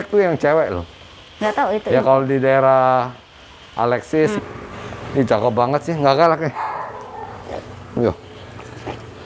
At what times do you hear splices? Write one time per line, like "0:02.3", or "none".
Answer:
0:04.4